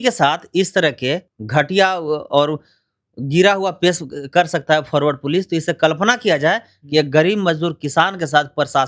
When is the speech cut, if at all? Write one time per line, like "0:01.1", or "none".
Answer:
0:01.3